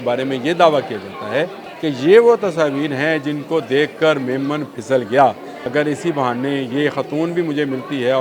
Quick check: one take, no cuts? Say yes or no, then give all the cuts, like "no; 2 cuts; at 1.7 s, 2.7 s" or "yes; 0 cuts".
no; 2 cuts; at 1.6 s, 5.5 s